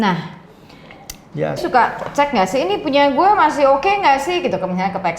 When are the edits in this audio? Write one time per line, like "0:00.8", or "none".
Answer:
0:01.6